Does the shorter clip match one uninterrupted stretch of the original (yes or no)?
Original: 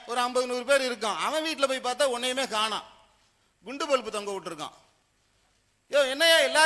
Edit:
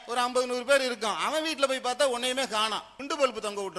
no